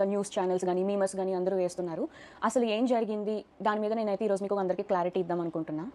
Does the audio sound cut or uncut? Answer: uncut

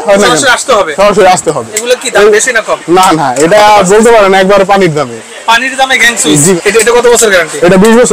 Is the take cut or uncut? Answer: cut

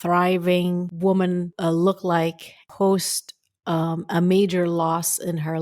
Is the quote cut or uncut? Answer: cut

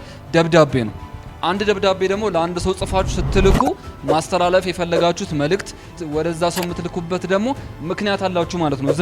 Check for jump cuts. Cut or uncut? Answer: cut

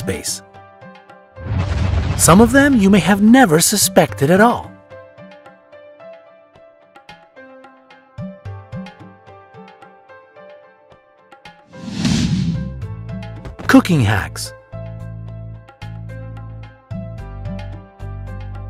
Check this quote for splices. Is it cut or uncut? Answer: uncut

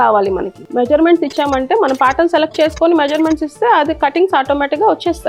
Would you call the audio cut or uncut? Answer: uncut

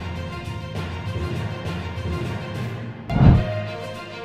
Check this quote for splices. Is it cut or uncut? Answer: cut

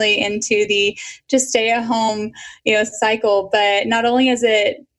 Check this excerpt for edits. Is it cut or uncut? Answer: cut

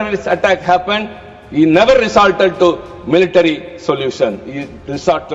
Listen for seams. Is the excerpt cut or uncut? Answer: uncut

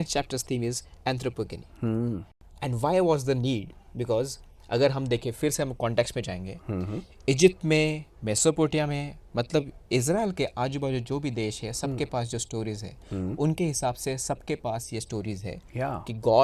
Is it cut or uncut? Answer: uncut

